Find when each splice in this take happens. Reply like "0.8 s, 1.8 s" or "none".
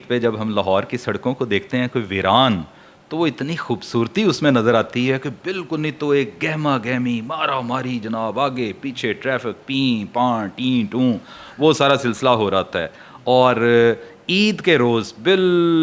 none